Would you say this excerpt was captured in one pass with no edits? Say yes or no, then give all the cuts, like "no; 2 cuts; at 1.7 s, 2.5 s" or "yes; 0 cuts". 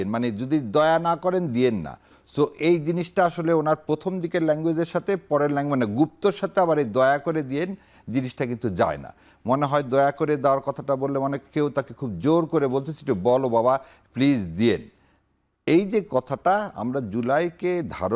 yes; 0 cuts